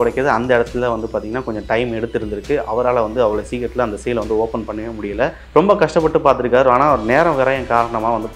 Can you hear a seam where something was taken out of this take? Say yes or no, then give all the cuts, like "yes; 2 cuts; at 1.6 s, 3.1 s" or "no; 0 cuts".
yes; 1 cut; at 5.4 s